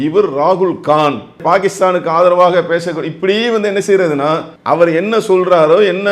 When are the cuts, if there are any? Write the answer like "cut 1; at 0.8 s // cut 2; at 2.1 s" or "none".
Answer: cut 1; at 1.4 s // cut 2; at 4.5 s

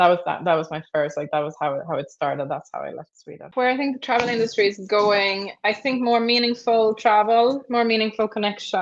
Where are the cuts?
cut 1; at 3.5 s

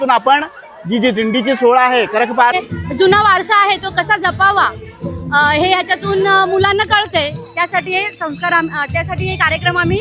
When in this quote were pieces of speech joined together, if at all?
cut 1; at 2.5 s

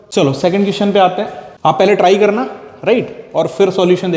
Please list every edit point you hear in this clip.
cut 1; at 1.4 s

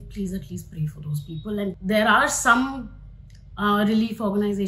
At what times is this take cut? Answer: cut 1; at 1.8 s

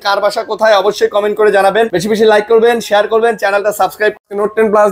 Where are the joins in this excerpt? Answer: cut 1; at 2.0 s // cut 2; at 4.2 s

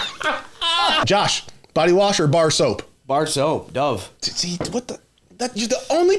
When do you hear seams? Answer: cut 1; at 1.0 s

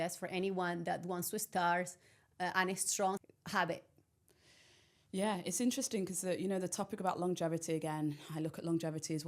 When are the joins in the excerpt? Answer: cut 1; at 3.2 s

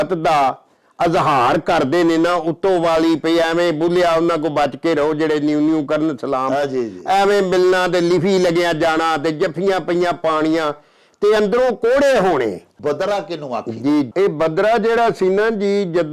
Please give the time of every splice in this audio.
cut 1; at 12.7 s

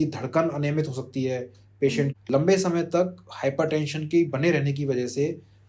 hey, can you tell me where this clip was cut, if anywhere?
cut 1; at 2.1 s

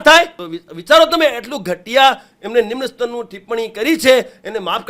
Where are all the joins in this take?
none

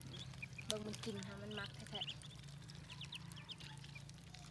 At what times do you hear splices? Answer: none

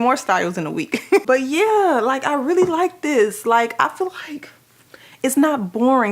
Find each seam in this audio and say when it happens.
cut 1; at 1.2 s

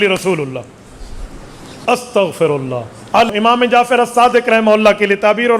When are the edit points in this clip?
cut 1; at 3.3 s

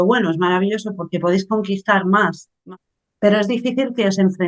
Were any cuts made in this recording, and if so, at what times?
cut 1; at 2.6 s

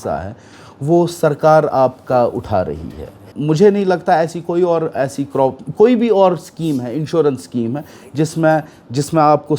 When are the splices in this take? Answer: cut 1; at 3.3 s

